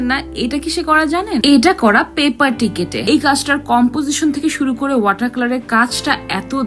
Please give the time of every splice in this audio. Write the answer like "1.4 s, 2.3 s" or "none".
1.4 s, 3.0 s